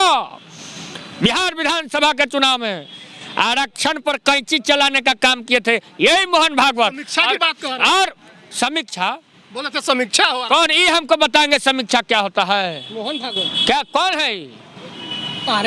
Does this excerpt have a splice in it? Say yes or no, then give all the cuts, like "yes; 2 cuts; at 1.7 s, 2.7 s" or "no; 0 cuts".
no; 0 cuts